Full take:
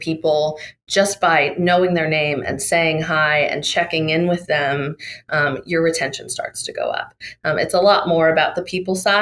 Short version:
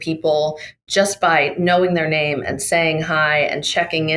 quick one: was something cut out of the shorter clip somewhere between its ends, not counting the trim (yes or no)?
no